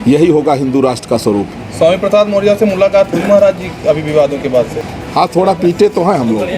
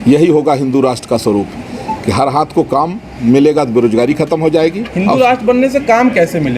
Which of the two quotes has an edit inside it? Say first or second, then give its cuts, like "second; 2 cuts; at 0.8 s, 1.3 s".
first; 2 cuts; at 1.6 s, 4.8 s